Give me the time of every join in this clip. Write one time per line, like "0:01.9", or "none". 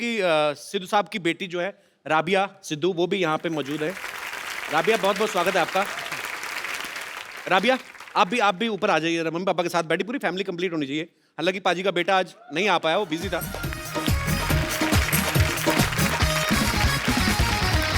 0:06.6